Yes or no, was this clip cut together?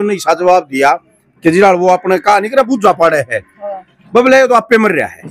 no